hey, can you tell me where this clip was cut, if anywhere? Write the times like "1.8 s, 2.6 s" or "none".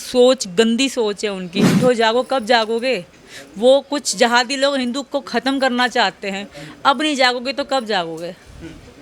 1.7 s